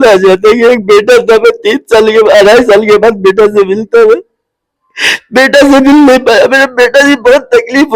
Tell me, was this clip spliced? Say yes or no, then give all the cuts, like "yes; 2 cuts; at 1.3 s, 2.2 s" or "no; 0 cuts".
no; 0 cuts